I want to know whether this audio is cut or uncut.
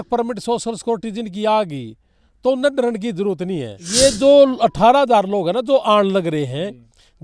cut